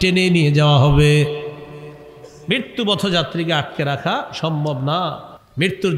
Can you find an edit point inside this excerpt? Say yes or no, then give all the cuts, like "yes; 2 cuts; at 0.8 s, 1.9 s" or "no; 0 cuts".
no; 0 cuts